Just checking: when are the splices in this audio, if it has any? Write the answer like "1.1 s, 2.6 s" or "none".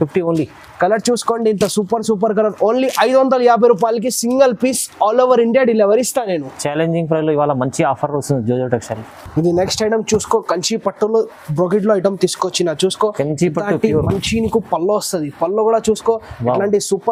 none